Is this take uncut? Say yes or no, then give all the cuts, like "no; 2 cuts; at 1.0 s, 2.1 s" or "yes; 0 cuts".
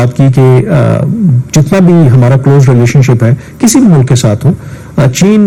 yes; 0 cuts